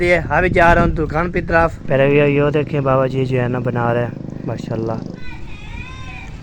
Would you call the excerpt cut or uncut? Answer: cut